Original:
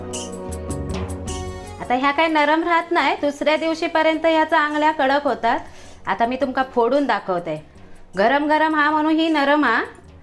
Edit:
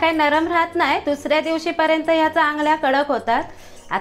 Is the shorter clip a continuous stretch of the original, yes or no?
yes